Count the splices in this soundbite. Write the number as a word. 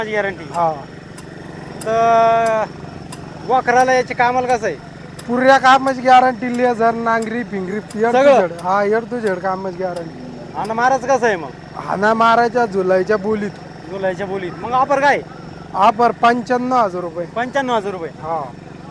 zero